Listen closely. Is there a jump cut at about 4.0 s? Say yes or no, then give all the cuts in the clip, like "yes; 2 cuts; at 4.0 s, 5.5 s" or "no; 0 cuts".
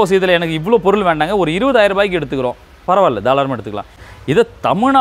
yes; 1 cut; at 4.0 s